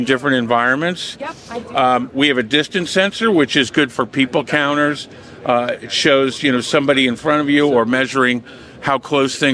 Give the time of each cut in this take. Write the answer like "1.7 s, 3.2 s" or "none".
none

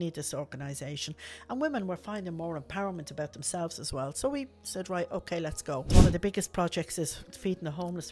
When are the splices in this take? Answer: 5.9 s

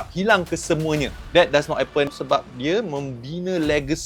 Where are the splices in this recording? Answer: 1.2 s, 2.1 s

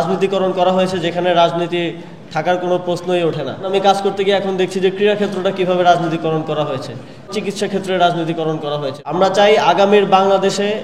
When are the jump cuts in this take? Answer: 3.7 s, 7.3 s, 8.9 s

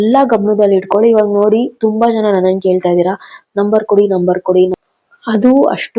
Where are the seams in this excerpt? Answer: 4.7 s

